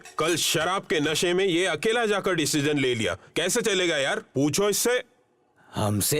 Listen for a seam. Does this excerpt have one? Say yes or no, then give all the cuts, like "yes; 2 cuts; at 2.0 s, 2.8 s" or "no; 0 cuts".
no; 0 cuts